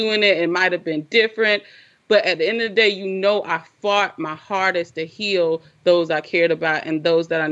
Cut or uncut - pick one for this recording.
uncut